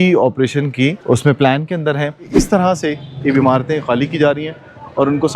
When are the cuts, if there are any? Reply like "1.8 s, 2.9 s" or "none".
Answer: 1.0 s, 2.3 s